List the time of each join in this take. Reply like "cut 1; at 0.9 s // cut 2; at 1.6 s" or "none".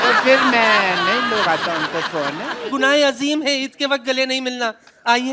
cut 1; at 2.5 s